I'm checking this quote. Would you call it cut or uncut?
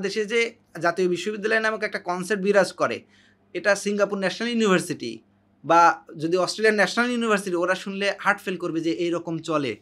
uncut